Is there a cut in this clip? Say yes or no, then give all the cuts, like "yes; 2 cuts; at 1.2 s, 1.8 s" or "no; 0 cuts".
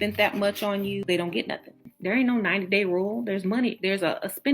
yes; 1 cut; at 1.9 s